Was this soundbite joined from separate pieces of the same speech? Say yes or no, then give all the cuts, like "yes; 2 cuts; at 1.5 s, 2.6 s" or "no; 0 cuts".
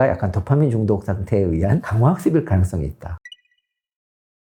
no; 0 cuts